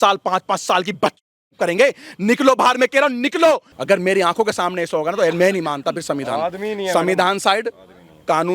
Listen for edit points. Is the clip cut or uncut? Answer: cut